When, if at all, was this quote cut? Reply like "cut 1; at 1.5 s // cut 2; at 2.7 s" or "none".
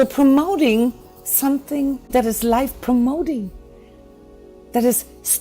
cut 1; at 2.1 s